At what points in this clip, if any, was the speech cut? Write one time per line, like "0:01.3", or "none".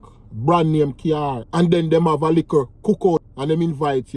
0:01.4
0:03.3